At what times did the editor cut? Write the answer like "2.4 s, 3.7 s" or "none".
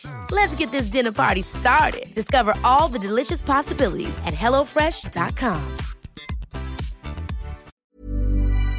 7.7 s